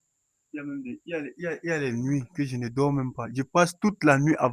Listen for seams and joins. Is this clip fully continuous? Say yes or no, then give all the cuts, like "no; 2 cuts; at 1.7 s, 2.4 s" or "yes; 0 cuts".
yes; 0 cuts